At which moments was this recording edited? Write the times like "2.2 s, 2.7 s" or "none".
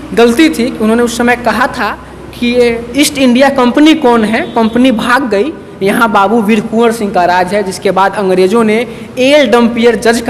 none